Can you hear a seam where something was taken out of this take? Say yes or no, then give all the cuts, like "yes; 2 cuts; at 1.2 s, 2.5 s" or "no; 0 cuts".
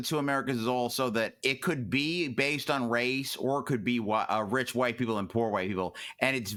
no; 0 cuts